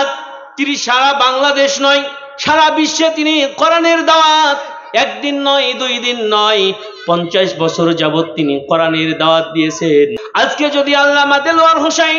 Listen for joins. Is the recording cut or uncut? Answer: cut